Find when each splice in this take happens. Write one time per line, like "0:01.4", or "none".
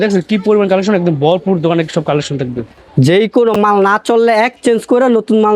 0:02.8